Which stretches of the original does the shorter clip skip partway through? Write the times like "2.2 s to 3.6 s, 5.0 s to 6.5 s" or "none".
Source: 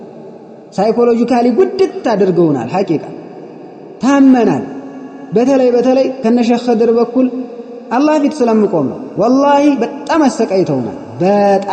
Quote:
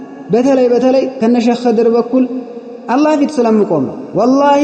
none